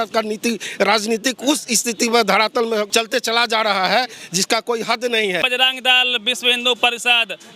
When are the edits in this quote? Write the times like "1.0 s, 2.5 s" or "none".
2.9 s, 5.4 s